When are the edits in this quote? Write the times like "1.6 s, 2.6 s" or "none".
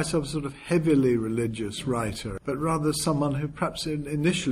2.3 s